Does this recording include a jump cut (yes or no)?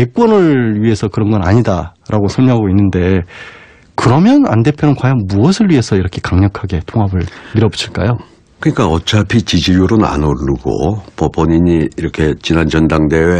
yes